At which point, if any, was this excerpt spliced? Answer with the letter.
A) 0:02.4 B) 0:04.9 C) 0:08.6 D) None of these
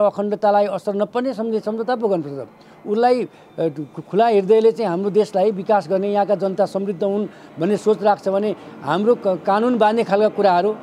D